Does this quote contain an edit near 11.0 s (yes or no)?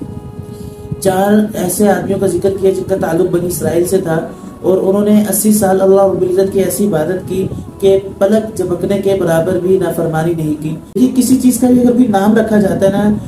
yes